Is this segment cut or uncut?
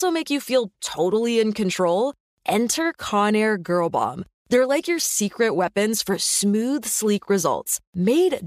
uncut